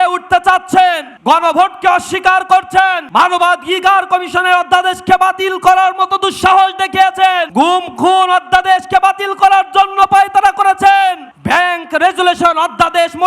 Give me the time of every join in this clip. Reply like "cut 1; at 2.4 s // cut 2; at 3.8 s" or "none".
cut 1; at 1.1 s // cut 2; at 3.0 s // cut 3; at 7.5 s // cut 4; at 11.3 s